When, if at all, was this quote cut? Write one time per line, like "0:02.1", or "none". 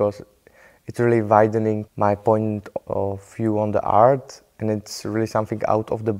0:01.9

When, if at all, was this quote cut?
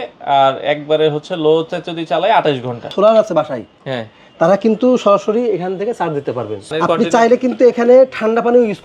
0:02.9
0:06.7

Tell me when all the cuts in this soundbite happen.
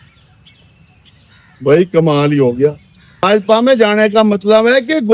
0:03.3

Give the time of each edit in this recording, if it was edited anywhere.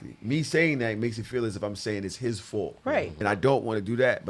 0:03.3

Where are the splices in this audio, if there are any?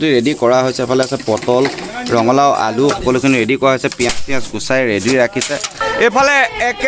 0:05.8

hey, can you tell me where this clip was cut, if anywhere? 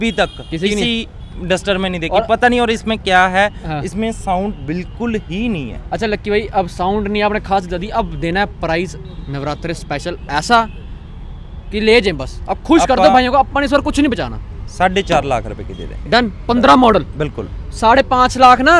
none

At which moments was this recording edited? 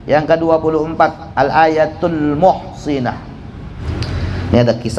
0:03.8

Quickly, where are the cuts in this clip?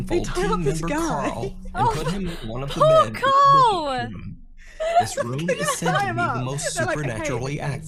none

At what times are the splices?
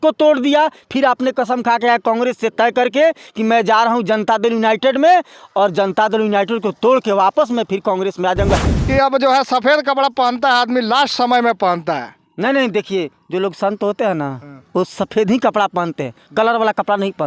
0:08.7

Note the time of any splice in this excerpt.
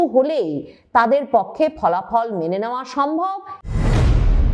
0:03.5

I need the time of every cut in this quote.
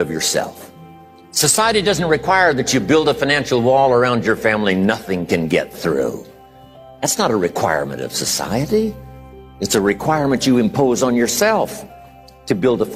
none

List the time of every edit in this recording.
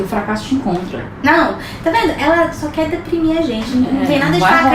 0:01.0

